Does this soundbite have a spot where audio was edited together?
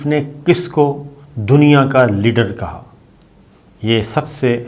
no; 0 cuts

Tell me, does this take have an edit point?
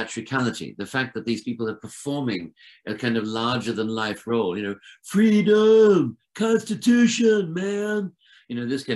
no; 0 cuts

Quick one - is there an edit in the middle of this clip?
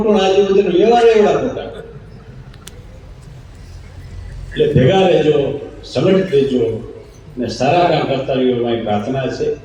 no; 0 cuts

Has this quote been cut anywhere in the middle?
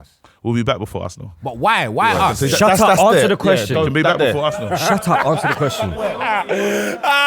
yes; 1 cut; at 5.5 s

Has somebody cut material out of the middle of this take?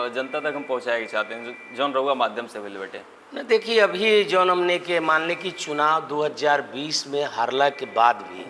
no; 0 cuts

